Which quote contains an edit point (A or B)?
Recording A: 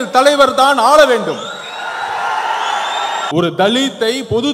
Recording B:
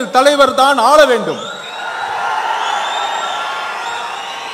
A